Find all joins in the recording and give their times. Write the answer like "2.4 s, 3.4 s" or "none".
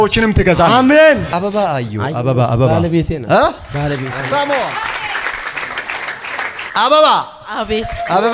1.3 s, 6.6 s